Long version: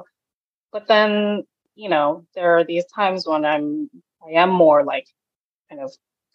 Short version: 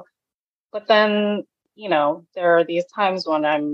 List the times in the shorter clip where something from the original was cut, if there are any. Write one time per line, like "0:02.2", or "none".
none